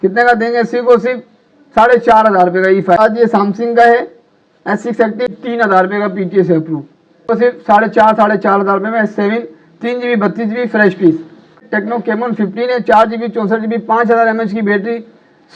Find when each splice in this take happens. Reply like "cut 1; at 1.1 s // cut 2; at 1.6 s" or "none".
cut 1; at 3.0 s // cut 2; at 5.4 s // cut 3; at 7.3 s // cut 4; at 11.6 s

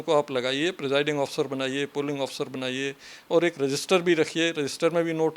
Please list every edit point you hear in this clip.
none

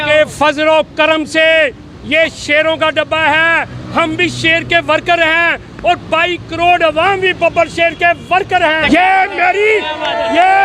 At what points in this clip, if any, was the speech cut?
cut 1; at 8.8 s

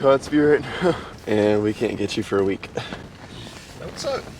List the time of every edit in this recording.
cut 1; at 1.1 s // cut 2; at 3.1 s

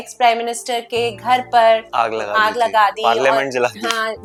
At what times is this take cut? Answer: none

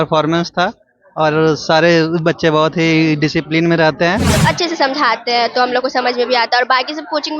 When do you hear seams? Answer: cut 1; at 4.4 s

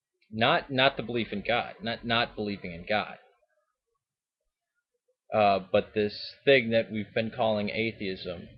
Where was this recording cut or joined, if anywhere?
none

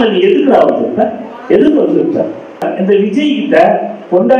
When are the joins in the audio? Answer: cut 1; at 2.7 s

